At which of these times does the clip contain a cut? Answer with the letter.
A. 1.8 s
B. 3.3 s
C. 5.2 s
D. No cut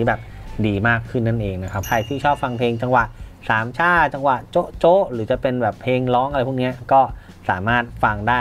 A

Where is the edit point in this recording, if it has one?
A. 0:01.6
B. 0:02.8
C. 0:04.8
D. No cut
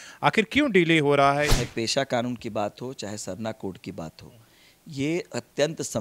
A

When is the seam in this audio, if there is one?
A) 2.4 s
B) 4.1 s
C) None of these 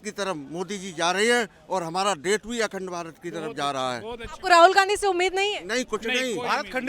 C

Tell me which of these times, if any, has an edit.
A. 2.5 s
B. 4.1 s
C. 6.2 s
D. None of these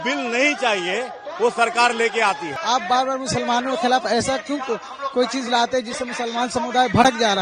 A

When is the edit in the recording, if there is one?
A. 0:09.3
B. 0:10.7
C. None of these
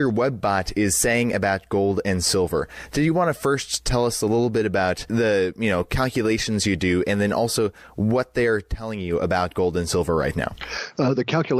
B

